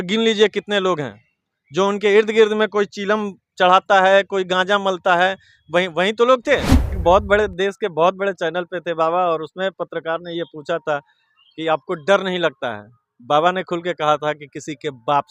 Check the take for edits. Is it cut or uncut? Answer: cut